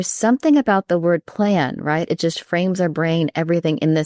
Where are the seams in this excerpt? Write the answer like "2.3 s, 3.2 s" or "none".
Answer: none